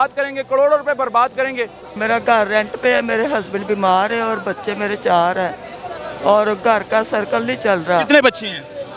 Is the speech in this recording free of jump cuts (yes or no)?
no